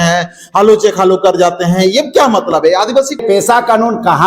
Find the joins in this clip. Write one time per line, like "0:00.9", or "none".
0:03.2